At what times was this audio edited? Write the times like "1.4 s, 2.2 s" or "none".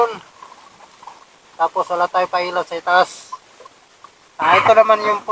none